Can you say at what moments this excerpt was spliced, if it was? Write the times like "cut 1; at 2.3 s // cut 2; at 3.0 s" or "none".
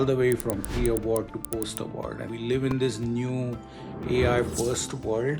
cut 1; at 2.3 s